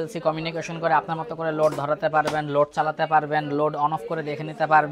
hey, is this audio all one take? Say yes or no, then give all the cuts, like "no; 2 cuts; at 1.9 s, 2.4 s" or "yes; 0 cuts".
yes; 0 cuts